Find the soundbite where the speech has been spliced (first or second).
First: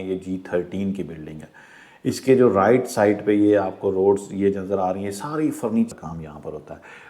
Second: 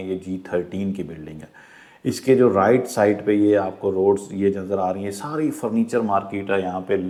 first